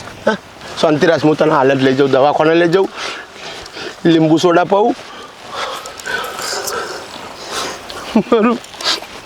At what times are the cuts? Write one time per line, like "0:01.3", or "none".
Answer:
none